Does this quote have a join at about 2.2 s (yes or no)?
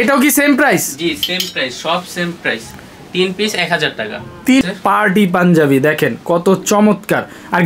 no